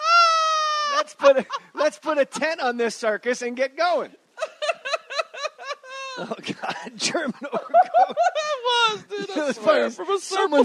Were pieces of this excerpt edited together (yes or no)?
yes